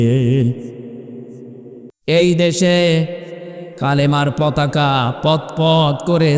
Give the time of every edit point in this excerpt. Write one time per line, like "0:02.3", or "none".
0:01.9